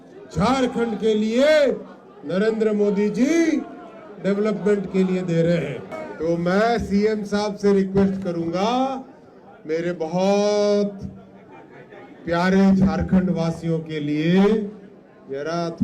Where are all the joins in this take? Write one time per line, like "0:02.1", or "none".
0:06.0